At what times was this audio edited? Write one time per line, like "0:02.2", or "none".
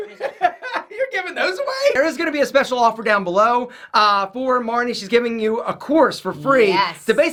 none

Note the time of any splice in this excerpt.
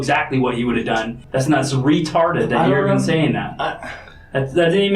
0:01.2

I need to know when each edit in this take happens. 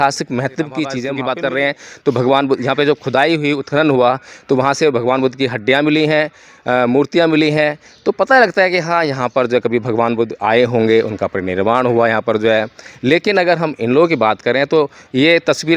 0:01.1

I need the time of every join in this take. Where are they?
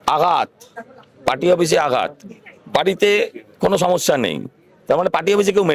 none

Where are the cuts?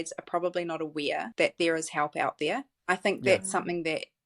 0:01.3
0:02.7

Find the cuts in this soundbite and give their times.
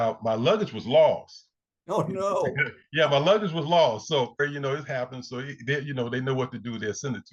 0:04.4

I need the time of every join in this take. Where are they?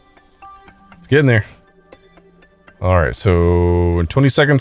none

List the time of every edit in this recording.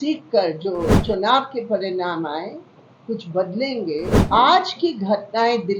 0:01.0
0:04.2

